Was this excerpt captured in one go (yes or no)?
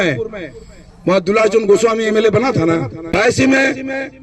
no